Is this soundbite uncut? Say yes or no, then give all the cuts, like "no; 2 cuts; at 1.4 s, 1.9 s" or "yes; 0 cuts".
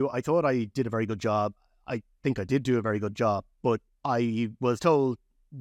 no; 1 cut; at 3.9 s